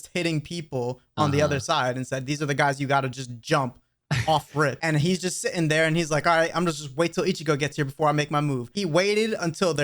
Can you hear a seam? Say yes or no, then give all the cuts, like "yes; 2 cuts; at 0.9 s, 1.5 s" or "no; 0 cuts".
yes; 2 cuts; at 4.8 s, 8.7 s